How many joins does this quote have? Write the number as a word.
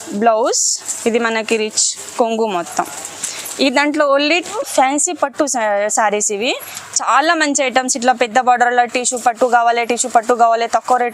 one